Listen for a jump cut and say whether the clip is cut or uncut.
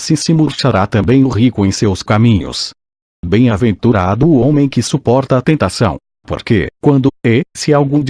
uncut